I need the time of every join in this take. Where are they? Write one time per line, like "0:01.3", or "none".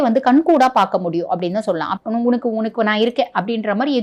0:01.9

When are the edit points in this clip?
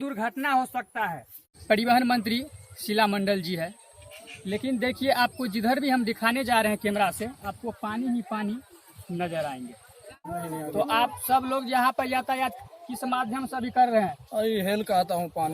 0:01.5
0:10.3

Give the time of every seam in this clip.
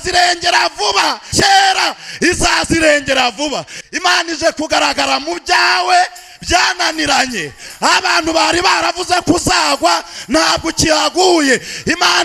0:03.7

